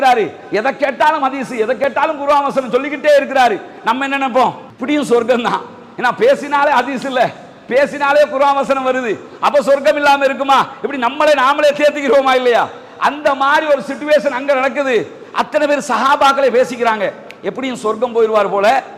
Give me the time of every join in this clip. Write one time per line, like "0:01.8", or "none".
none